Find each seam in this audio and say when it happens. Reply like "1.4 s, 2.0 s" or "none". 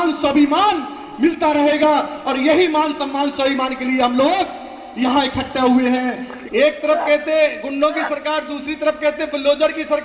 6.3 s